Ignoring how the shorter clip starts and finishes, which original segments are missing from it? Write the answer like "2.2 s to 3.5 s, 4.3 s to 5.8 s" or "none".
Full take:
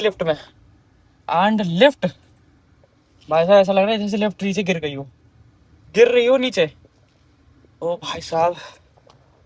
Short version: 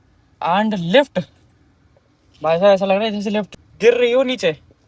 4.4 s to 5.7 s